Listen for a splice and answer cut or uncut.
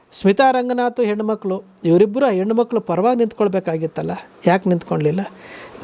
uncut